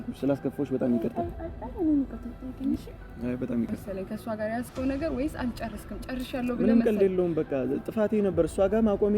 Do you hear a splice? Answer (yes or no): yes